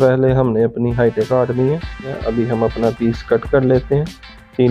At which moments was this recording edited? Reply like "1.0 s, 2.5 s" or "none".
2.2 s